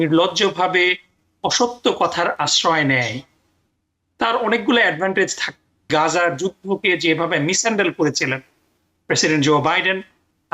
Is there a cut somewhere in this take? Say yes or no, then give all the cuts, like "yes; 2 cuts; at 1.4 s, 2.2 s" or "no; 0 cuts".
yes; 1 cut; at 5.9 s